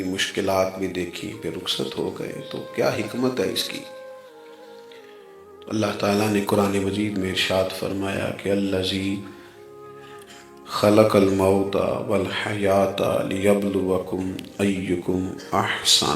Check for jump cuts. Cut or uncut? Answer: cut